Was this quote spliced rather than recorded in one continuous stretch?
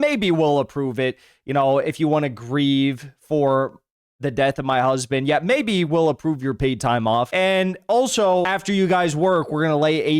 yes; 2 cuts; at 7.3 s, 8.4 s

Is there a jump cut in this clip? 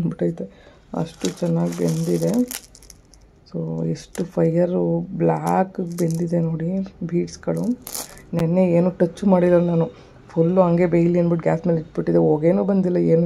no; 0 cuts

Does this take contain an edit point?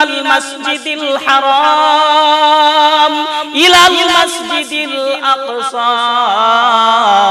no; 0 cuts

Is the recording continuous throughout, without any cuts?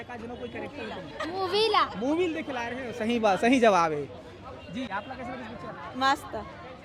yes; 0 cuts

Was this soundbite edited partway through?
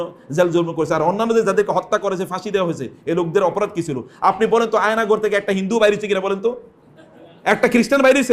no; 0 cuts

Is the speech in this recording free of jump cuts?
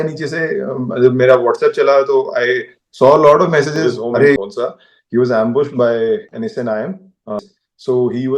no; 2 cuts; at 4.4 s, 7.4 s

